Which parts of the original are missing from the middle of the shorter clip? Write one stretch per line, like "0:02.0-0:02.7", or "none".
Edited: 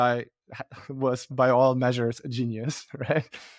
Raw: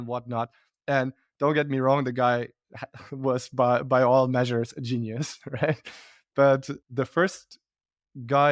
0:03.5-0:03.8